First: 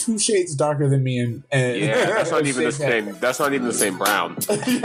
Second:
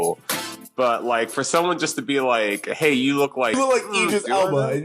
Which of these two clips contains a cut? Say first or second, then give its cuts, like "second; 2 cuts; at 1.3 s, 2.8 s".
second; 1 cut; at 3.5 s